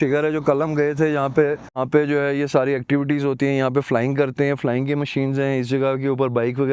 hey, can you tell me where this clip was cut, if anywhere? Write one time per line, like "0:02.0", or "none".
0:01.8